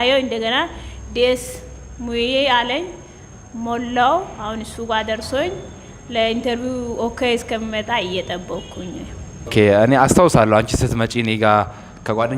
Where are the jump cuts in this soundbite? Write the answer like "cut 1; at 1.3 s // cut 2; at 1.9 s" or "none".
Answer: cut 1; at 9.5 s